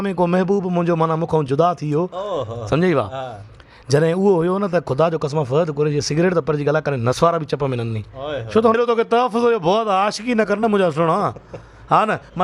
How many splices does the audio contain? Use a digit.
1